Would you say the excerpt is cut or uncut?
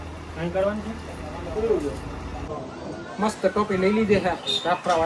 cut